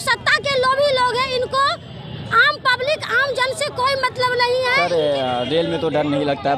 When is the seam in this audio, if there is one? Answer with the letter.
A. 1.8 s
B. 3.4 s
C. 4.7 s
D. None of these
C